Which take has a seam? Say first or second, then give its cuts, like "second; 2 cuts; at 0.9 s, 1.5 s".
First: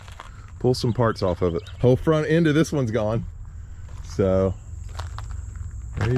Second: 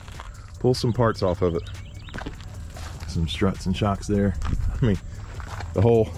first; 1 cut; at 1.7 s